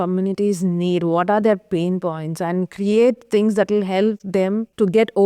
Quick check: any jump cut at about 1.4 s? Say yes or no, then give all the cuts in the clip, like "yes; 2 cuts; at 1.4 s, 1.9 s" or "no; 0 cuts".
no; 1 cut; at 4.2 s